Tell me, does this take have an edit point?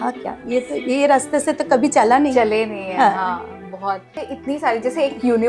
yes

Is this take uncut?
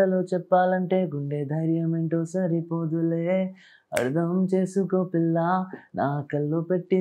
yes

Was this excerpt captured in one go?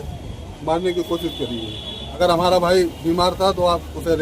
no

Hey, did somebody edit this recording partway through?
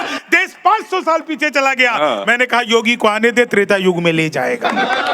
no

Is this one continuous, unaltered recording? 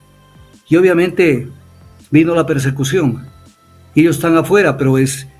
yes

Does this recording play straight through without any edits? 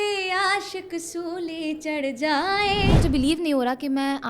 no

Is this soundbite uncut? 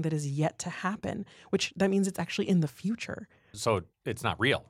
no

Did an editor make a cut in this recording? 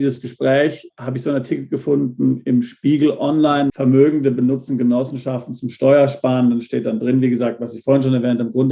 yes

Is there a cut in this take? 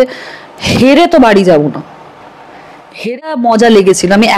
yes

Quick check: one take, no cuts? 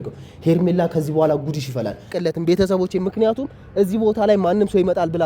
no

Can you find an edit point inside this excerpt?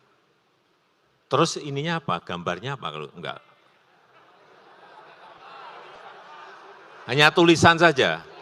no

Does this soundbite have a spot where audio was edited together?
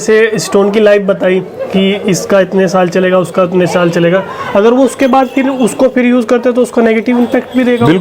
no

